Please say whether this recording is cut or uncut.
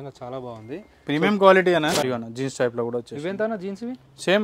cut